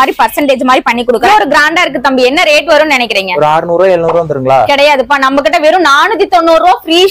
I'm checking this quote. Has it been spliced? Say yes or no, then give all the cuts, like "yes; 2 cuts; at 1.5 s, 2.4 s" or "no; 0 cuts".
yes; 1 cut; at 1.2 s